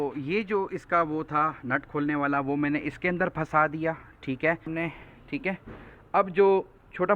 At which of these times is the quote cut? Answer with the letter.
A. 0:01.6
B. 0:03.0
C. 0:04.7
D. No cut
C